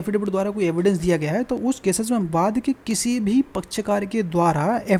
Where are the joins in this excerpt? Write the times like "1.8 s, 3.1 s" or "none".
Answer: none